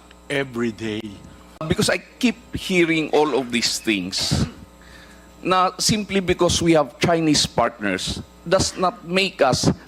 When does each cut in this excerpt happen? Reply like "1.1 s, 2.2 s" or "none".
1.6 s